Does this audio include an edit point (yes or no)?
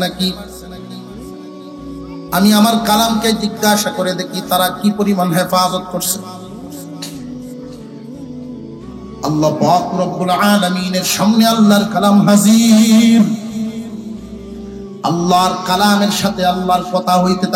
yes